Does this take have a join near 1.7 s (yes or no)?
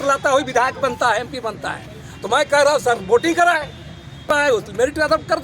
no